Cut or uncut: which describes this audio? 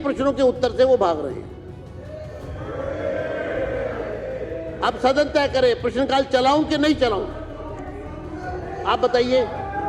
uncut